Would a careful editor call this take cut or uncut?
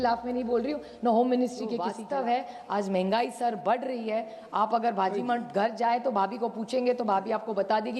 cut